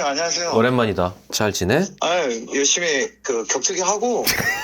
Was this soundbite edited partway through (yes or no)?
yes